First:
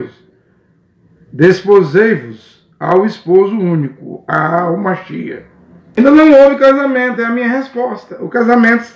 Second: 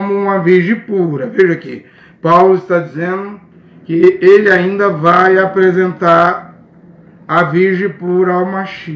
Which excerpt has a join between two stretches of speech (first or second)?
first